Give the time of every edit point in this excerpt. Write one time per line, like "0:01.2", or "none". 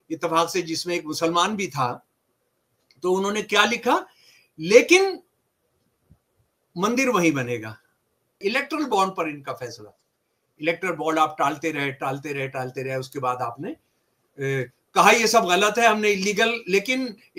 0:08.3